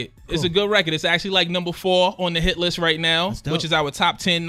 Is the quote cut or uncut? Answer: uncut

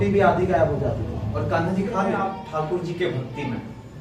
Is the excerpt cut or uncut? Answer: cut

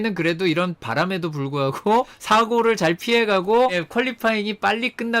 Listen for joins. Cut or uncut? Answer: uncut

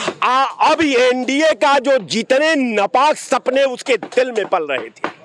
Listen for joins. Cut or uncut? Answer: uncut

